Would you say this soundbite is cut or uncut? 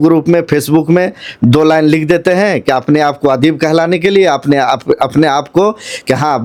uncut